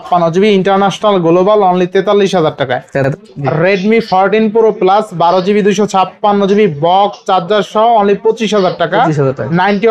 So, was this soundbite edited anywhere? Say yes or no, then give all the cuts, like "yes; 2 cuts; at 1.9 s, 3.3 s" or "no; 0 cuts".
yes; 1 cut; at 3.0 s